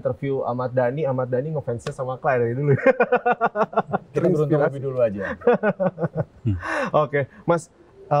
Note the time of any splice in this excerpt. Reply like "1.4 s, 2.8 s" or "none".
none